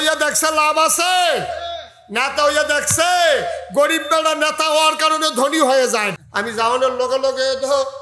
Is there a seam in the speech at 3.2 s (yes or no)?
no